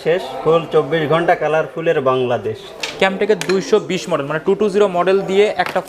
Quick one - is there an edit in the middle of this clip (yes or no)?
yes